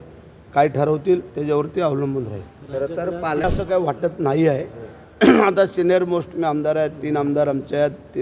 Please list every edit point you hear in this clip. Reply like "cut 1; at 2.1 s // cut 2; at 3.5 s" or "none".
cut 1; at 3.4 s